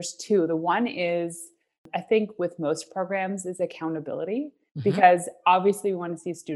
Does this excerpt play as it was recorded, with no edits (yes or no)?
no